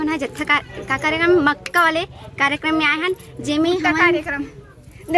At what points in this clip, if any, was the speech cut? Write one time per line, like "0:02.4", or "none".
none